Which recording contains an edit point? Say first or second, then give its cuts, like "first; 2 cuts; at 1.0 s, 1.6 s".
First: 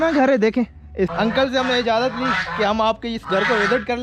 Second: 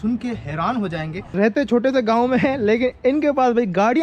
second; 1 cut; at 1.2 s